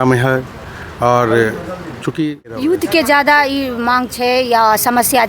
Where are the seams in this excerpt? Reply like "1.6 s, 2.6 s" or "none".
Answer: 2.6 s